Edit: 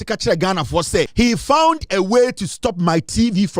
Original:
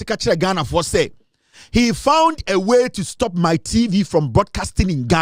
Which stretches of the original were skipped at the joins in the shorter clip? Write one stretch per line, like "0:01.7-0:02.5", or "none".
0:01.1-0:01.7